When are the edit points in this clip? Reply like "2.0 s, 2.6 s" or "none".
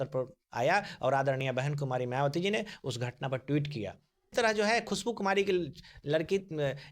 4.3 s